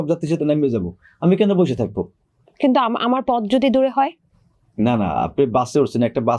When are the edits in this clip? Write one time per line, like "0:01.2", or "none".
none